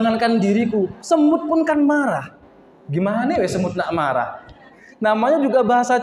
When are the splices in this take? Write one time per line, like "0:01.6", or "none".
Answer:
0:04.8